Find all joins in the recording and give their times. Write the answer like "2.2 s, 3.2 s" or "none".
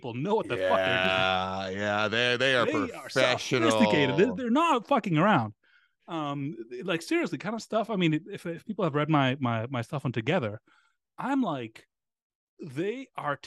none